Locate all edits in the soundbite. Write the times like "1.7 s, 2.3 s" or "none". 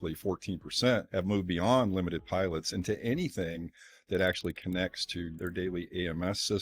1.1 s, 5.3 s